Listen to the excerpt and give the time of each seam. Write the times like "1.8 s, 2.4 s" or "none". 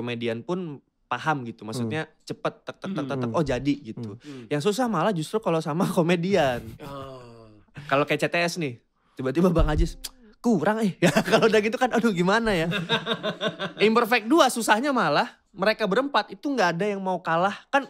none